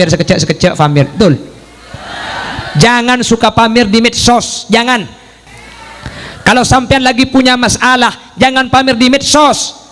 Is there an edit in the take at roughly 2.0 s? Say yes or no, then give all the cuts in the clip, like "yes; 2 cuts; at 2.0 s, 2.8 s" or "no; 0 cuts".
no; 1 cut; at 5.3 s